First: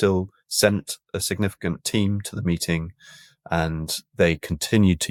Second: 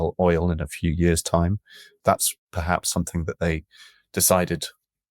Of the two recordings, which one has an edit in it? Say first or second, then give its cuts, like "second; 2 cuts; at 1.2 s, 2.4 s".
second; 1 cut; at 1.9 s